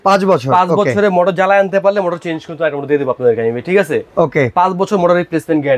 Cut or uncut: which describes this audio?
uncut